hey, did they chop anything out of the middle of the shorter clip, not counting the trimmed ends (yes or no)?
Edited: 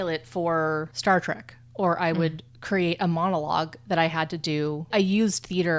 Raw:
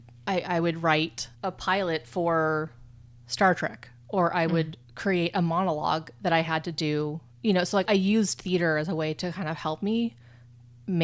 yes